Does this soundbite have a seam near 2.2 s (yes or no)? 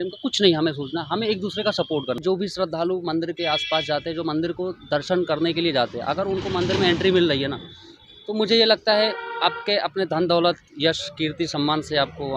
yes